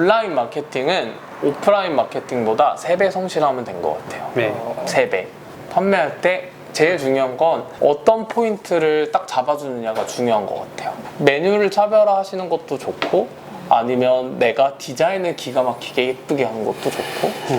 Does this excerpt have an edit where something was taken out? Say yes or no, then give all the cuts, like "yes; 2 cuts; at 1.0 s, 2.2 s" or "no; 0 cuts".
yes; 2 cuts; at 5.5 s, 11.0 s